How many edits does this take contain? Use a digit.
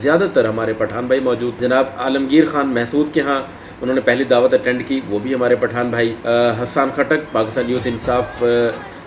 2